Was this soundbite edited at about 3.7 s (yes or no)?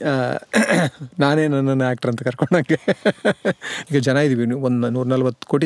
yes